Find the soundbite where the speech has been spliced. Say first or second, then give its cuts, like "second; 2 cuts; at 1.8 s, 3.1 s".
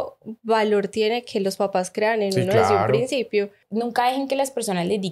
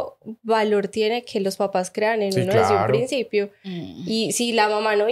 first; 1 cut; at 3.6 s